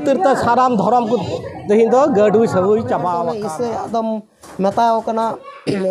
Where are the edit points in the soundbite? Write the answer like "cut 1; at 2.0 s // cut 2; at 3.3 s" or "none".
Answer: cut 1; at 3.3 s